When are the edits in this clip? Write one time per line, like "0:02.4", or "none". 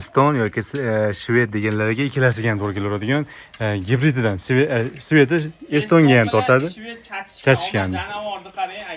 none